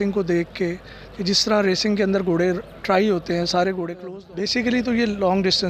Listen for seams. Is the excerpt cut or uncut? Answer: cut